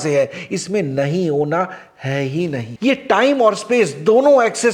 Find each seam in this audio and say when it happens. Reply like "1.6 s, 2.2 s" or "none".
2.7 s